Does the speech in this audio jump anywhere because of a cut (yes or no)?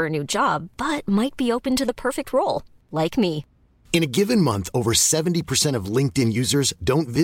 no